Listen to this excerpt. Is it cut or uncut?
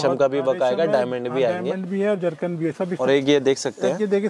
cut